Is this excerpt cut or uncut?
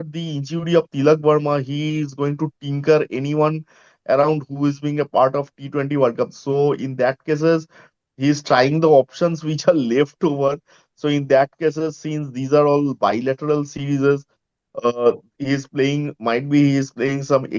uncut